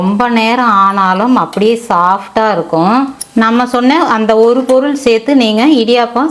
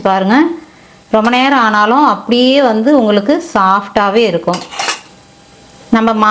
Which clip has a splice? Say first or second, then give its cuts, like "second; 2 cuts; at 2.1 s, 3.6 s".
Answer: first; 1 cut; at 3.2 s